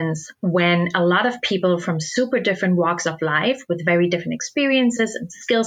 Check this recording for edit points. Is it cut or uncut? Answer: uncut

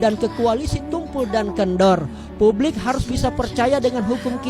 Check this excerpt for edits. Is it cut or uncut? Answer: uncut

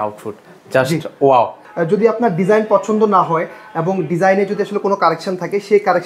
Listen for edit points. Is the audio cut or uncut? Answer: cut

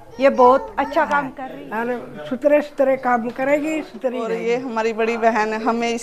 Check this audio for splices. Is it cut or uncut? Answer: cut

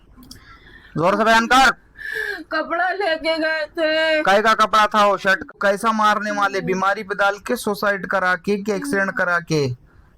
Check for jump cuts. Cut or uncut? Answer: cut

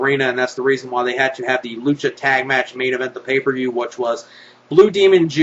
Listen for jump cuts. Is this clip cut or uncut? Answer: uncut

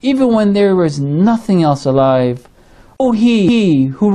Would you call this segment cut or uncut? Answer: uncut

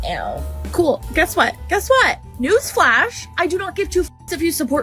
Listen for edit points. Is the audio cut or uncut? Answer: uncut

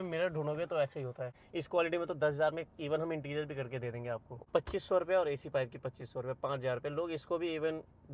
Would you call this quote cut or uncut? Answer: cut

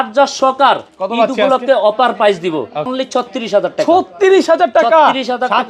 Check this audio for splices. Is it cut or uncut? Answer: cut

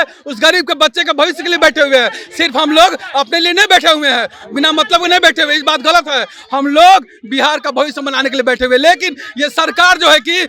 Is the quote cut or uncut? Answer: uncut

